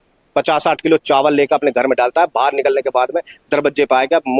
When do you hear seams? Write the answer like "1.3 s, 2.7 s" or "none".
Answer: none